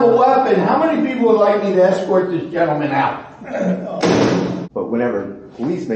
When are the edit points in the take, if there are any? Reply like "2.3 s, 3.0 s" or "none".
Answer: 4.6 s